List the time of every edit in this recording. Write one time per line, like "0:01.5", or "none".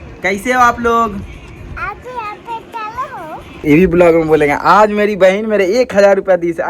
0:03.6